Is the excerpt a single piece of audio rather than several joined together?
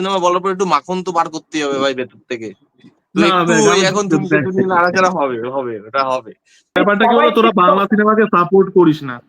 no; 1 cut; at 6.8 s

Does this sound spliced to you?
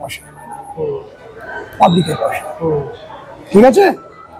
no; 0 cuts

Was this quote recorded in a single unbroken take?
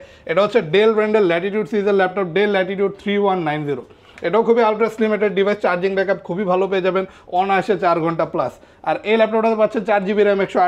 yes; 0 cuts

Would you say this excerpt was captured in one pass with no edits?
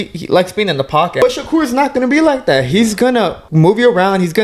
no; 2 cuts; at 1.2 s, 3.4 s

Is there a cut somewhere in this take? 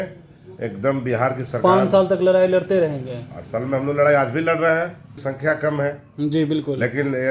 yes; 1 cut; at 5.1 s

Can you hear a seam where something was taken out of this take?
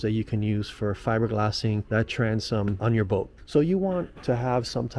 yes; 2 cuts; at 1.8 s, 3.3 s

